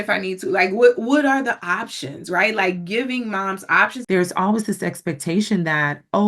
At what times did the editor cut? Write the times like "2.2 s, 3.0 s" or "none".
4.0 s

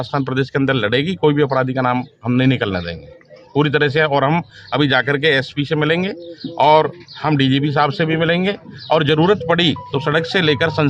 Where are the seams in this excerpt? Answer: none

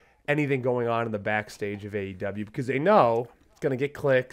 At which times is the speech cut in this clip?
none

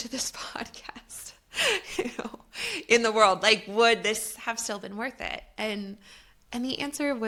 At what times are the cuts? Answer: none

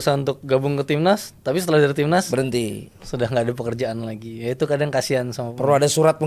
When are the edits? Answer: none

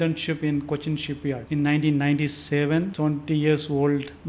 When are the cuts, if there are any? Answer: 1.4 s, 2.9 s

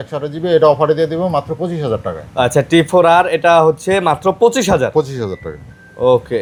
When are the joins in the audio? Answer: none

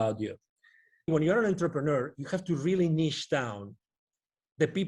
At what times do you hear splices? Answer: 1.1 s

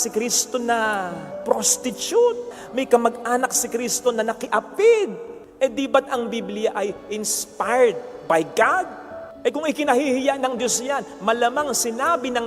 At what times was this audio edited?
none

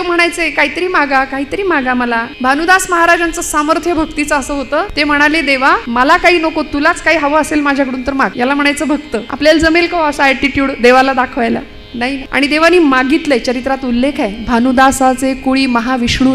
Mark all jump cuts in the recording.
2.3 s, 4.9 s, 5.8 s, 8.3 s, 9.3 s, 12.2 s

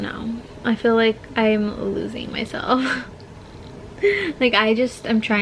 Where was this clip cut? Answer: none

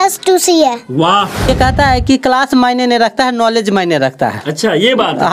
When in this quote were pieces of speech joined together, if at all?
1.5 s

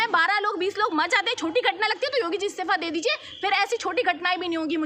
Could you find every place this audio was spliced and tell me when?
none

